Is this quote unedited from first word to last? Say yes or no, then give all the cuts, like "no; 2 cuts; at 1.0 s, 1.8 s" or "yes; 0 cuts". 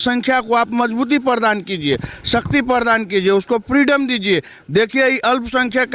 yes; 0 cuts